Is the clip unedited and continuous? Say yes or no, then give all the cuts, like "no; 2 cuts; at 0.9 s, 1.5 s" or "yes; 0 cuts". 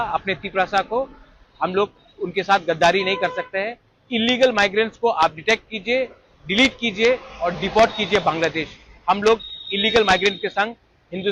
yes; 0 cuts